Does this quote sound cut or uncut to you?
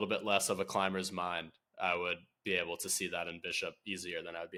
uncut